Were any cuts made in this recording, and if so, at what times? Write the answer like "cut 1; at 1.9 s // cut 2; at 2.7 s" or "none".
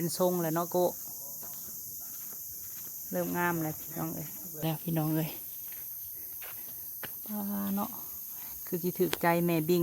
cut 1; at 4.6 s